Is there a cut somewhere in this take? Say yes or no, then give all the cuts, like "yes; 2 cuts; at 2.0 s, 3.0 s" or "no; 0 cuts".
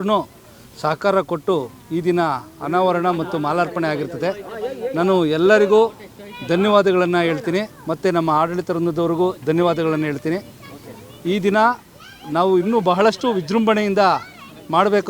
no; 0 cuts